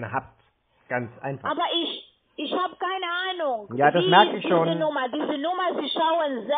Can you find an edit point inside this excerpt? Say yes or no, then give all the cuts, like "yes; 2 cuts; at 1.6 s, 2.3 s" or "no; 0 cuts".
no; 0 cuts